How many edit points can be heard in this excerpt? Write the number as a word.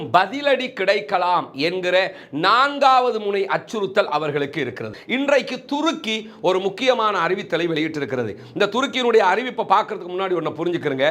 one